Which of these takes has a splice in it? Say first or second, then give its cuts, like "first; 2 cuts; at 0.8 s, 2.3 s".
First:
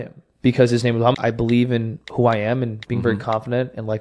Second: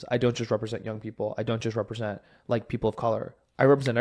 first; 1 cut; at 1.2 s